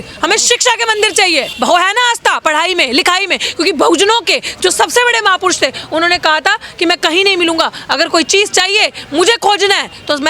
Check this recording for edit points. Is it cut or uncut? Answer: cut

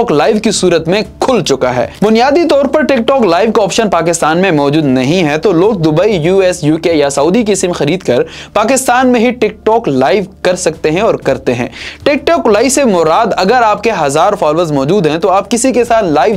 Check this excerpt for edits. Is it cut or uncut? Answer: uncut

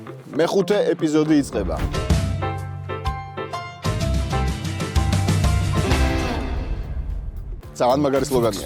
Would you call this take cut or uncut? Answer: cut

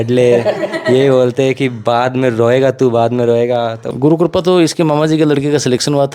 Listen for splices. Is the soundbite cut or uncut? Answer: cut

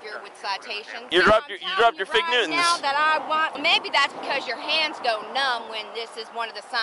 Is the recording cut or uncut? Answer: cut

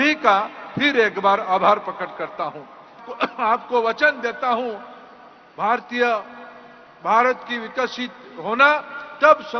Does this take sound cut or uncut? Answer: cut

